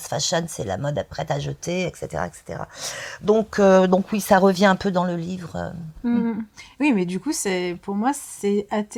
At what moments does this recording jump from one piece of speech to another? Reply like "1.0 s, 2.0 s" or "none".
none